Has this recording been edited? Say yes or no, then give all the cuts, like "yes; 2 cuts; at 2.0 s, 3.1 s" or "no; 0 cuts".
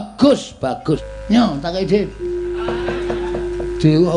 yes; 1 cut; at 0.9 s